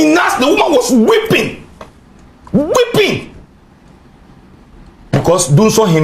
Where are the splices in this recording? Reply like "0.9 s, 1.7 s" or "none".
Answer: none